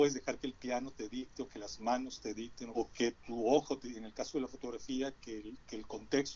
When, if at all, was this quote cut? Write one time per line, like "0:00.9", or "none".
0:02.6